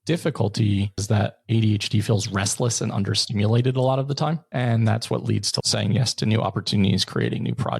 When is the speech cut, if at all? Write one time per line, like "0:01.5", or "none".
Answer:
0:01.0
0:04.4
0:05.5

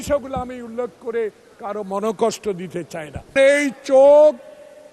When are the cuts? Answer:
0:03.3

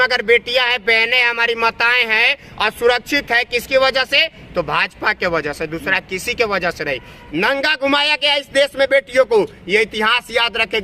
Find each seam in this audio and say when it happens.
0:07.2

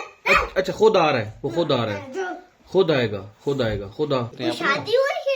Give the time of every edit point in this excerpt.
0:04.3

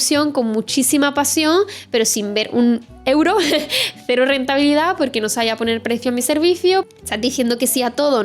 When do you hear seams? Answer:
0:06.9

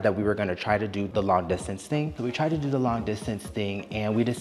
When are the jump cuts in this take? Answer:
0:01.1
0:02.1

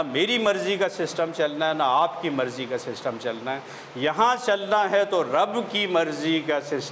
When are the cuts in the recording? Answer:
none

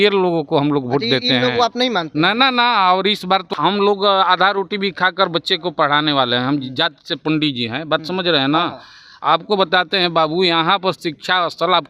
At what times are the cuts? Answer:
0:03.5

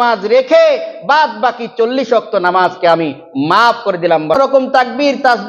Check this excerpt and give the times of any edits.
0:04.4

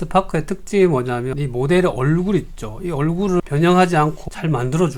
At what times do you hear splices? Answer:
none

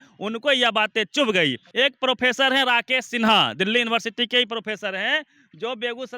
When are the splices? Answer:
0:01.6

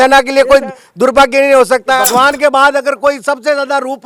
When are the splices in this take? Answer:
0:02.0

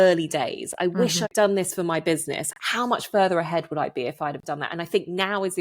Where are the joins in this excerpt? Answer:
0:01.2

